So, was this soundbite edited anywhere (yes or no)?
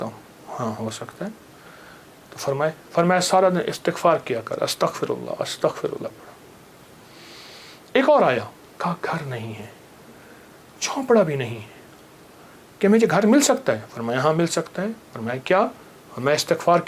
no